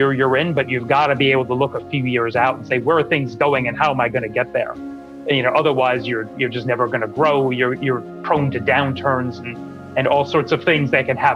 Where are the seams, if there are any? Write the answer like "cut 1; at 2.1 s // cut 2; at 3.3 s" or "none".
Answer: none